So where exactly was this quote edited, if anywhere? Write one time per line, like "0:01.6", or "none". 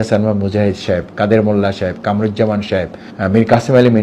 0:03.0